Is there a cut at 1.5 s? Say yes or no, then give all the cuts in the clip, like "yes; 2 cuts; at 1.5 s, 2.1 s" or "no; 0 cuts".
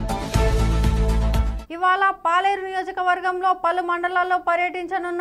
no; 0 cuts